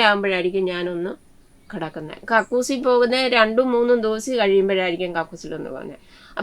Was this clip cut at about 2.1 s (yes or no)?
yes